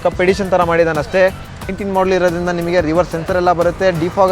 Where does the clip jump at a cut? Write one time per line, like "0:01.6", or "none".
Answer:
0:01.7